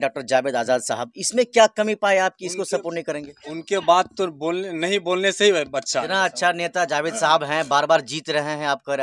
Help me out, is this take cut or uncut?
cut